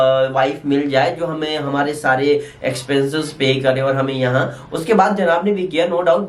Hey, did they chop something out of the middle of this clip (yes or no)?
no